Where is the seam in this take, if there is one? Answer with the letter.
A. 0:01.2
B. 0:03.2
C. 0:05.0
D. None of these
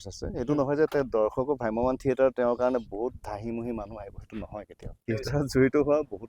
C